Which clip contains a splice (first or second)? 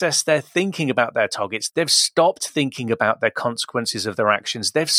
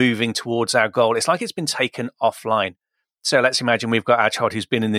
first